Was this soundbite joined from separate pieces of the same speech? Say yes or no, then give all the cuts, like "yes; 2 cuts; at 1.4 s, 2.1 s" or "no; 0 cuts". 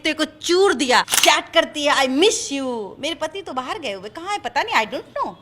yes; 1 cut; at 1.1 s